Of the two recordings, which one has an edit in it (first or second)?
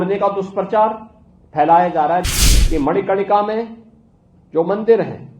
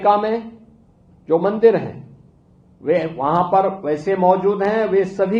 first